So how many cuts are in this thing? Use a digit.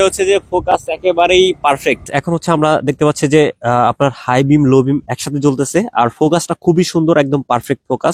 1